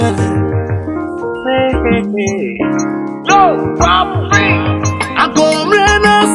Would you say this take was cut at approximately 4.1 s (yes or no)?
no